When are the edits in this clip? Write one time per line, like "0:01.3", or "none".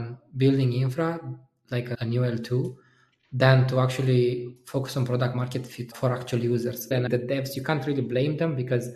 0:02.0
0:05.9
0:07.1